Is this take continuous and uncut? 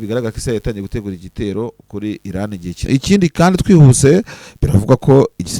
no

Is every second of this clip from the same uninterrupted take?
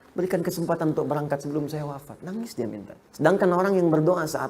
no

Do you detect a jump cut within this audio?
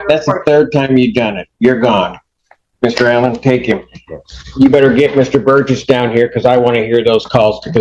no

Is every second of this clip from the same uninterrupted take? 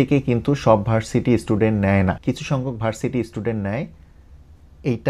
yes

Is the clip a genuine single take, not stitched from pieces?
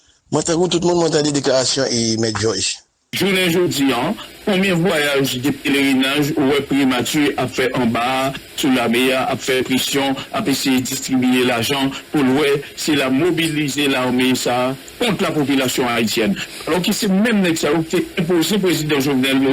no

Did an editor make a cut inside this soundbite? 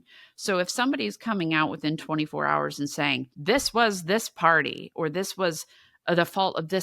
yes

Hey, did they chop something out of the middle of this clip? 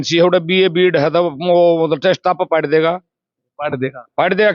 no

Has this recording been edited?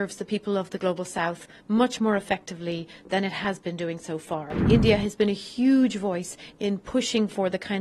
yes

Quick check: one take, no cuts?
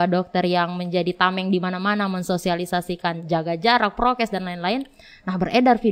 yes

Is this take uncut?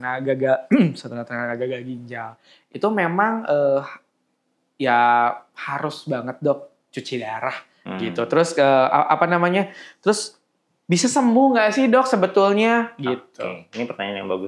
yes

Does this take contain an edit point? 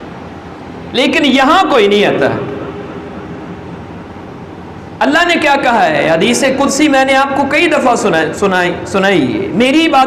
no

